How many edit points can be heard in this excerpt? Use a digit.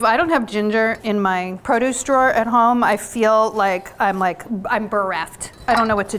1